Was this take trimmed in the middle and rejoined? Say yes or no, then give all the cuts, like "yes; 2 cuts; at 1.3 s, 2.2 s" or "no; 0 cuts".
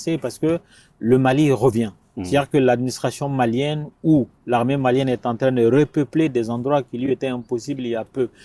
no; 0 cuts